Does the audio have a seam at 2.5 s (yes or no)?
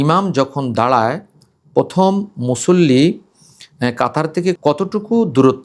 no